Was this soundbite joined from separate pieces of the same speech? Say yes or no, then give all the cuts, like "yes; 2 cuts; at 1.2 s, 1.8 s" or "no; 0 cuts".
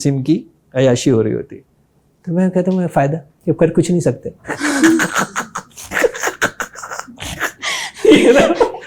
no; 0 cuts